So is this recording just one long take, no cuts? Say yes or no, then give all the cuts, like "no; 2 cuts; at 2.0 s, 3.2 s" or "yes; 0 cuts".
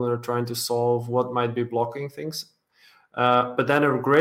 yes; 0 cuts